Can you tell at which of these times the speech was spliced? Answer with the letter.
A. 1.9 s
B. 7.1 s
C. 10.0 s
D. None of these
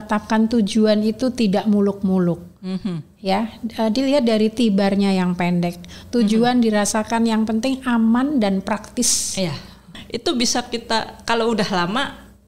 C